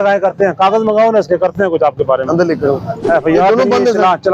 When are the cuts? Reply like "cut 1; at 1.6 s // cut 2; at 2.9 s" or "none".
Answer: cut 1; at 2.9 s